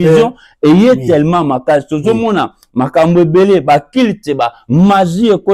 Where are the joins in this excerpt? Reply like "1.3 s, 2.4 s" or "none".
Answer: none